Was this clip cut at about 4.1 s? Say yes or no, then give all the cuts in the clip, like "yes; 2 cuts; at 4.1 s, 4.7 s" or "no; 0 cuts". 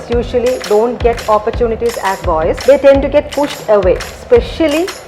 yes; 2 cuts; at 2.6 s, 4.1 s